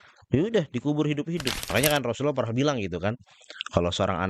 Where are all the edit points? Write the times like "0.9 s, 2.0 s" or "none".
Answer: 1.6 s